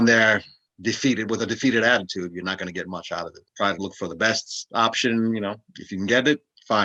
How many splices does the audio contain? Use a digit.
0